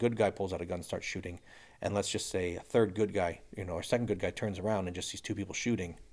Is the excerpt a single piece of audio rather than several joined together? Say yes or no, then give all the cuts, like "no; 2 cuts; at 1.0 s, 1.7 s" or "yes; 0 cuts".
yes; 0 cuts